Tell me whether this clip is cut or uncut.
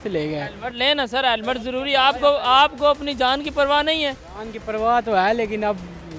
uncut